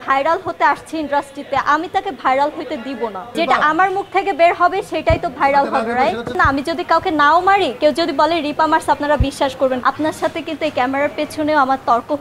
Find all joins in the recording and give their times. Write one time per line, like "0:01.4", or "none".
0:03.3
0:06.3
0:09.8